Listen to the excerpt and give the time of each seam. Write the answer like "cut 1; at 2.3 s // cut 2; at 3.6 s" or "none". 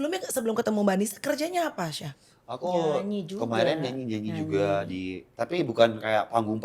none